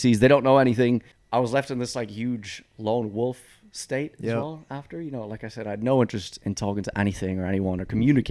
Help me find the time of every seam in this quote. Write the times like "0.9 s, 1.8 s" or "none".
1.1 s